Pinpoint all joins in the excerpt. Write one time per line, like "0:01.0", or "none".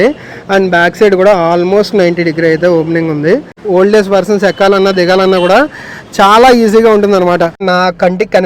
0:03.6
0:07.6

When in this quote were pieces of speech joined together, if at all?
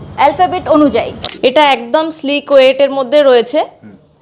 0:01.1

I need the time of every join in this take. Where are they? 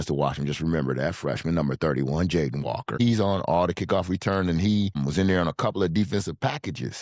0:03.0
0:05.0

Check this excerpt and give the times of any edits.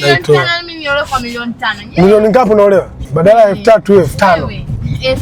0:03.0

